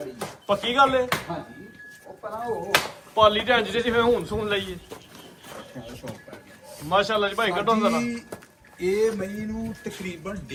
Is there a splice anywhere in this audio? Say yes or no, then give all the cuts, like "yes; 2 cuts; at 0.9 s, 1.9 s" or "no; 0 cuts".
no; 0 cuts